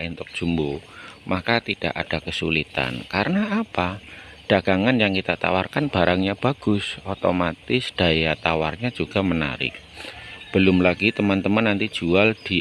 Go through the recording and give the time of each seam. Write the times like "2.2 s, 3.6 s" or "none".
none